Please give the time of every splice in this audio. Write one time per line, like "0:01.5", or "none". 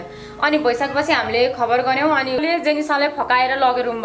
0:02.4